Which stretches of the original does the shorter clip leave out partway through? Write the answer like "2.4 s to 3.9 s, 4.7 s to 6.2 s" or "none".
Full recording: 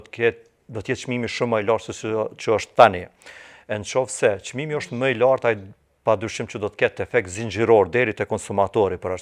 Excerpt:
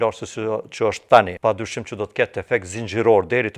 3.0 s to 6.0 s